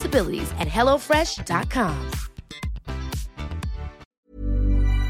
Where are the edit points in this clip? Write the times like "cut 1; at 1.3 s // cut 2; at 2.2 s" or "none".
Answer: cut 1; at 4.0 s